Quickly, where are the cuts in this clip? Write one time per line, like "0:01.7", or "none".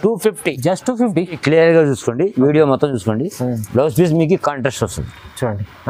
0:01.4